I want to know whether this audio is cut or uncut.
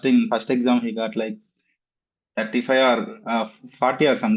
uncut